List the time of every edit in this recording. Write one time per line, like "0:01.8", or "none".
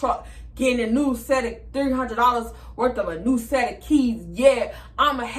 none